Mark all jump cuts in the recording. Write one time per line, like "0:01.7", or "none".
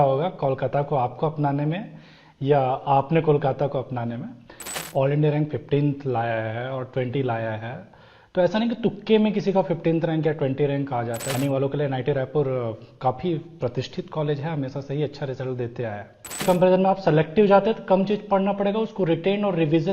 0:04.8
0:11.4
0:16.4